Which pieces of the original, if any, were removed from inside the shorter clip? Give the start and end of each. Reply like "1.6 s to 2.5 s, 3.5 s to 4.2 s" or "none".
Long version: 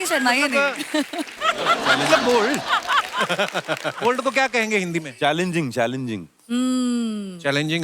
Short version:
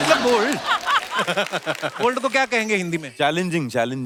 none